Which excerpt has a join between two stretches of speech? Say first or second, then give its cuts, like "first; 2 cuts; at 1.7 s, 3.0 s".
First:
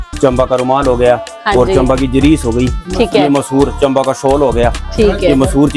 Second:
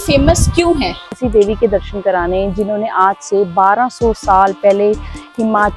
second; 1 cut; at 1.2 s